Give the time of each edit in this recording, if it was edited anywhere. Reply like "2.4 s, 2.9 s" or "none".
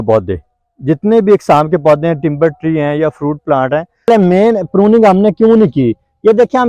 4.1 s

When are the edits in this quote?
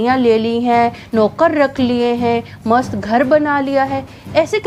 none

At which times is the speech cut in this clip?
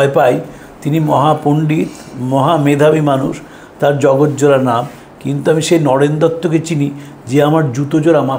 none

